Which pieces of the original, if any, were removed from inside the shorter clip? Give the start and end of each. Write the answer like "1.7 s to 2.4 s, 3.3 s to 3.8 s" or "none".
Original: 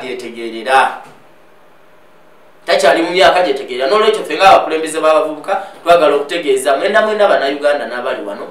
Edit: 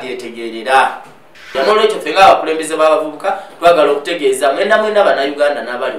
1.4 s to 3.7 s